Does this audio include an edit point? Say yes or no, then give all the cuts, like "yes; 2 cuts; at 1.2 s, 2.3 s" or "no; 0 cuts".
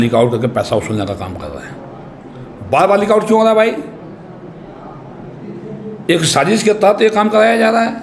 no; 0 cuts